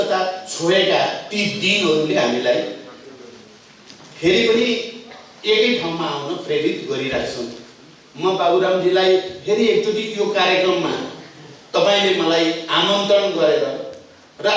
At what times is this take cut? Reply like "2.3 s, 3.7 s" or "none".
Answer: none